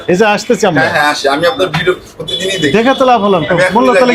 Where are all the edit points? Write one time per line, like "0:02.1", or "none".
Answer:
none